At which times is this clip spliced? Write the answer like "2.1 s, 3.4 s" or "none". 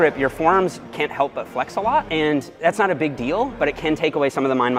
none